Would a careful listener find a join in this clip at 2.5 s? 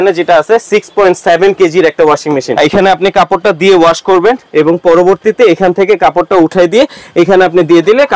yes; 1 cut; at 2.5 s

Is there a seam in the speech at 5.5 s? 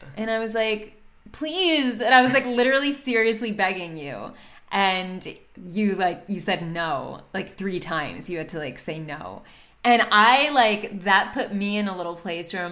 no; 0 cuts

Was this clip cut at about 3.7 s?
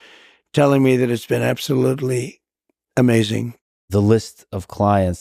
yes; 1 cut; at 3.7 s

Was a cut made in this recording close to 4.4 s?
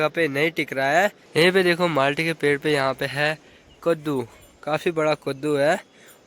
no; 1 cut; at 1.2 s

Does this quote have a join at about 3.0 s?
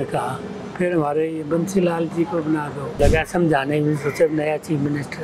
yes; 1 cut; at 3.0 s

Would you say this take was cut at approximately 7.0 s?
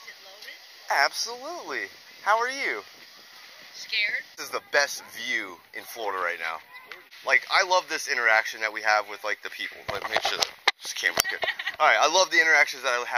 yes; 2 cuts; at 4.4 s, 7.0 s

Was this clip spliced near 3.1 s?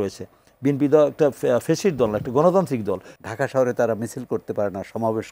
yes; 1 cut; at 3.1 s

